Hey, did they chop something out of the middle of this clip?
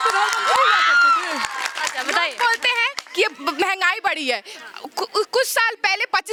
no; 0 cuts

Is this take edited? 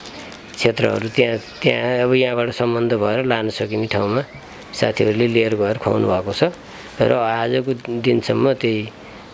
no; 0 cuts

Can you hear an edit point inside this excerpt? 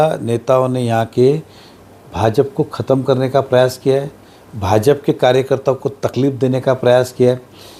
no; 0 cuts

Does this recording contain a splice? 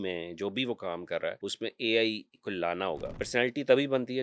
yes; 2 cuts; at 1.4 s, 3.1 s

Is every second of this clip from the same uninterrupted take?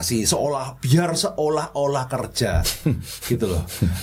yes; 0 cuts

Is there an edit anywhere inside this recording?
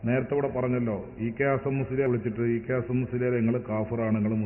yes; 1 cut; at 2.1 s

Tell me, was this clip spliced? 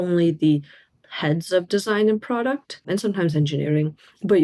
yes; 1 cut; at 2.9 s

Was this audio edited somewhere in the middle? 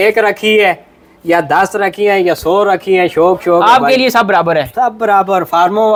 no; 0 cuts

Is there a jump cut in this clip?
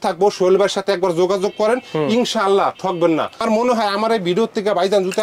yes; 1 cut; at 3.4 s

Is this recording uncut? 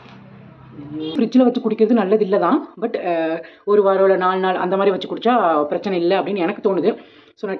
no; 1 cut; at 1.2 s

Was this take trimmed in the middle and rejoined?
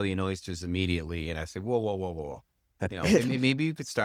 no; 0 cuts

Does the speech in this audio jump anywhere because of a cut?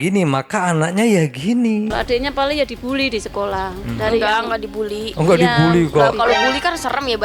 yes; 1 cut; at 1.9 s

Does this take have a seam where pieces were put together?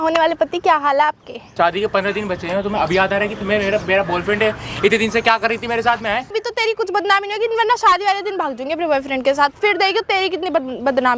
yes; 2 cuts; at 1.5 s, 6.4 s

